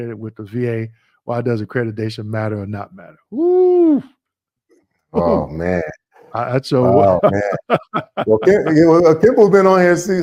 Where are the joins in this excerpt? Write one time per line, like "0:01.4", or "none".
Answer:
none